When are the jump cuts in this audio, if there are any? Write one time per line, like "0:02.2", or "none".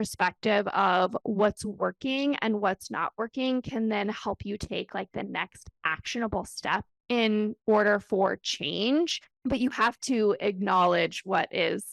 none

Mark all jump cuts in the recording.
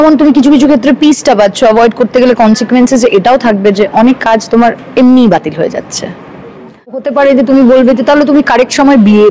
0:07.0

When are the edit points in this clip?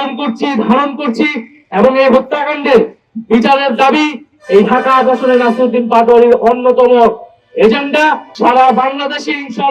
0:08.3

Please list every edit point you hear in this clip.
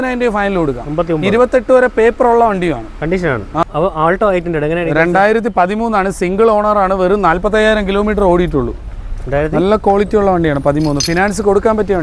none

